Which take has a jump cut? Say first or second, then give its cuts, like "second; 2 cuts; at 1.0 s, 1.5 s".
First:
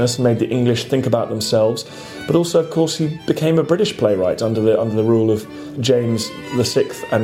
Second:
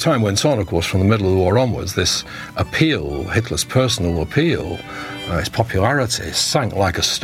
first; 2 cuts; at 5.7 s, 6.4 s